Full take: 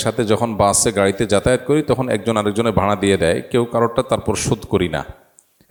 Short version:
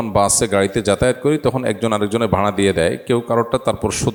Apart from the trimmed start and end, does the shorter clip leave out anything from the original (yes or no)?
no